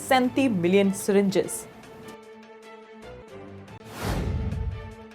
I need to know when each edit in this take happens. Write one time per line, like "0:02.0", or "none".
0:02.0
0:03.7